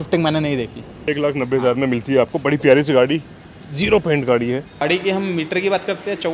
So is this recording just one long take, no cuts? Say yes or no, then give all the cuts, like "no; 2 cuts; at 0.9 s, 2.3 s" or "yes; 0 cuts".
no; 2 cuts; at 0.9 s, 4.8 s